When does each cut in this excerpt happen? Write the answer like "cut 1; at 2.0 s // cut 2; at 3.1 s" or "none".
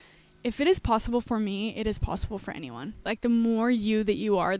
cut 1; at 3.1 s